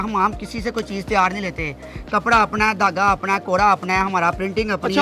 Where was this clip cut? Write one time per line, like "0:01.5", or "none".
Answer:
none